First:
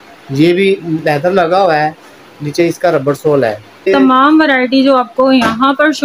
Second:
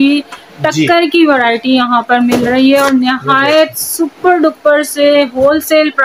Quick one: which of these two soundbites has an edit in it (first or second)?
first